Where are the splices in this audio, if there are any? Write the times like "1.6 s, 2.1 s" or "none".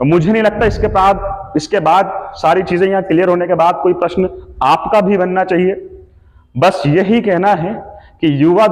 none